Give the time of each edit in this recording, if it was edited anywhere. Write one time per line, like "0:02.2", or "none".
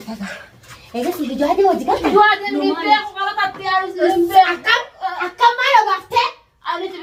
none